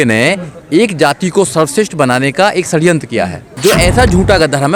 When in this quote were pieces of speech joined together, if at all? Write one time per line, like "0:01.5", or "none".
0:03.5